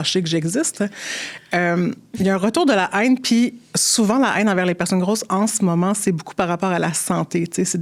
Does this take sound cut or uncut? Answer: uncut